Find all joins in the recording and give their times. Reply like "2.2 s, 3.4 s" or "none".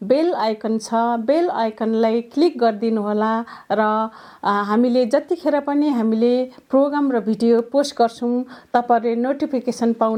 none